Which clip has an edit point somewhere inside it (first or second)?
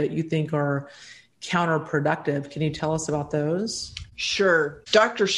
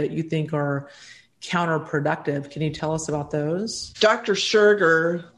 second